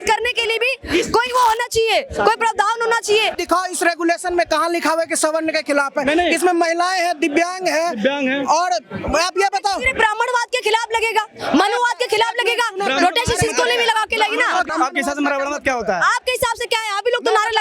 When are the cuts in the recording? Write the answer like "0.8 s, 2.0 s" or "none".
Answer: 3.3 s, 14.7 s